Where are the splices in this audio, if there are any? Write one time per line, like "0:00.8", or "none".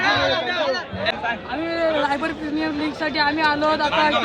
0:01.1